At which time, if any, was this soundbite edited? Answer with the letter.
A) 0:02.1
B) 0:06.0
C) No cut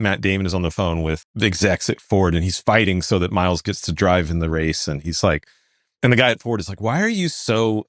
B